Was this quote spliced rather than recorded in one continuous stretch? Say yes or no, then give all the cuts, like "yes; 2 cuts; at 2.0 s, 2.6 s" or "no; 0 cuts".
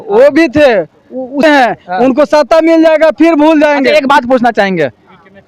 yes; 1 cut; at 1.4 s